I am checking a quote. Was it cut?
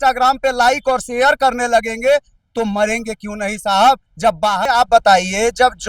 yes; 1 cut; at 4.6 s

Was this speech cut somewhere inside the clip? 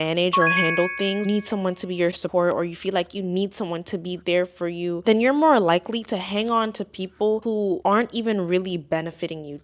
yes; 1 cut; at 1.2 s

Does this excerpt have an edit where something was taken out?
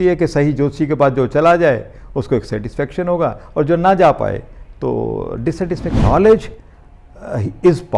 yes; 1 cut; at 6.0 s

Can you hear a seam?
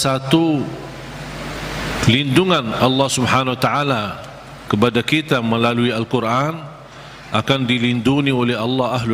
no; 0 cuts

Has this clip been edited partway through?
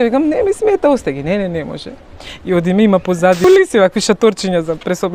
yes; 1 cut; at 3.4 s

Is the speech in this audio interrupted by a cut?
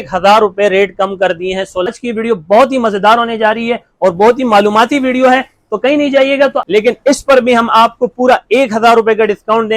yes; 2 cuts; at 1.9 s, 6.6 s

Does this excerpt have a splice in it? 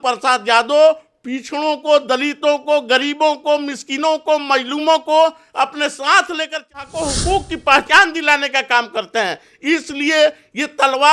yes; 1 cut; at 6.9 s

